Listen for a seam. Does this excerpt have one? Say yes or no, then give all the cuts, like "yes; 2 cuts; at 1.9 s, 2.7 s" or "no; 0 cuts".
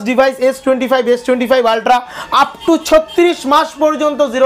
no; 0 cuts